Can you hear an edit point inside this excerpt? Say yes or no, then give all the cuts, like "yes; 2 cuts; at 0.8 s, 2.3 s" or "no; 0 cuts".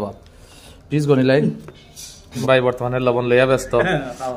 yes; 1 cut; at 2.4 s